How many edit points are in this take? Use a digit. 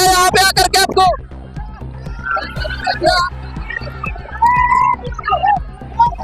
0